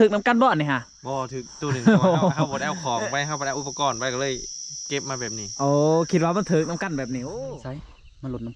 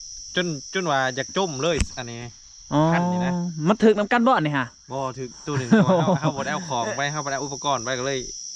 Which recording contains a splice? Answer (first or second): first